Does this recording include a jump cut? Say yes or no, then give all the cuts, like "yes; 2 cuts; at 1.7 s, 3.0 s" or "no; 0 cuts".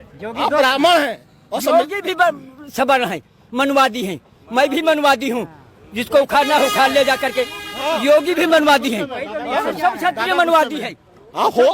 no; 0 cuts